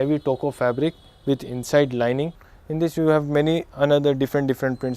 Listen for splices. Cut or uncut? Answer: cut